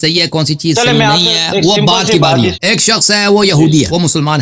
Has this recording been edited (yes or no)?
yes